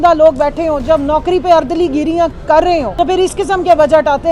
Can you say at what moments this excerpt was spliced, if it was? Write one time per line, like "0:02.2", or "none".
0:02.9